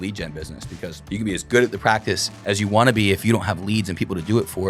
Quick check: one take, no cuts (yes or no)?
no